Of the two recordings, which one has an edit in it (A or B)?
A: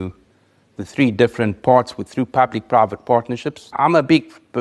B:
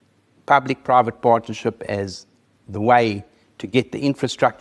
A